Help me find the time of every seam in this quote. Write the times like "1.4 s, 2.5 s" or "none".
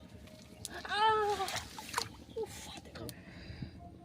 3.1 s

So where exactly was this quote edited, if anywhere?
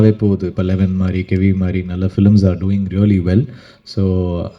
none

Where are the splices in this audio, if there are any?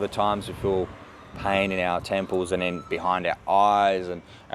none

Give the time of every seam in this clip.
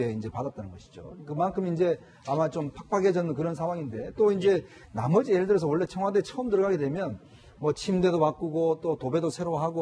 3.4 s

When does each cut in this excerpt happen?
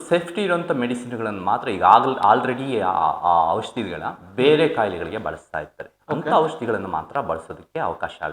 none

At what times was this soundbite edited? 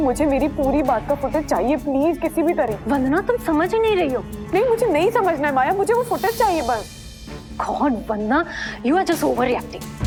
none

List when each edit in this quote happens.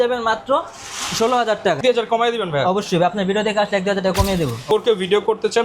1.8 s, 4.6 s

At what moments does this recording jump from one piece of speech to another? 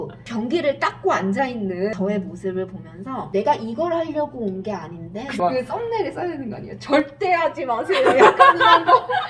1.9 s, 5.3 s

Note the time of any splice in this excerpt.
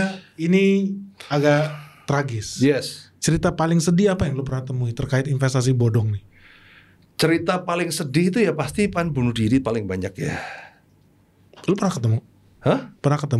none

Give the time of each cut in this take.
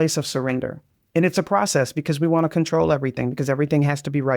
1.0 s

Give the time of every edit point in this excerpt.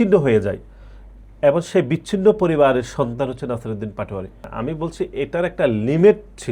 4.5 s

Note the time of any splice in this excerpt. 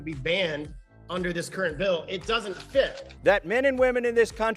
3.1 s

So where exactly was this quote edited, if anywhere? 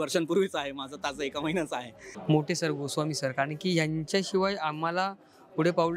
2.1 s

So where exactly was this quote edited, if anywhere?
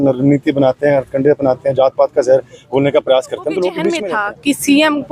4.0 s

